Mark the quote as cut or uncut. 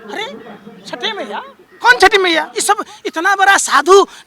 cut